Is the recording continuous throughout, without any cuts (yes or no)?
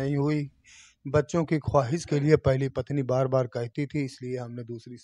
yes